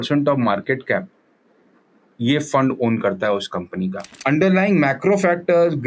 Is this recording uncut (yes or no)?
no